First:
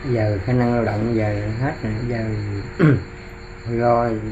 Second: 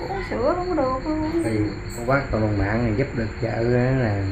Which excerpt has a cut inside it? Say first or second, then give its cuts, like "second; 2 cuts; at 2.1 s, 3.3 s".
second; 1 cut; at 2.0 s